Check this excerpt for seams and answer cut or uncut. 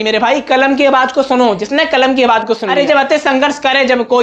cut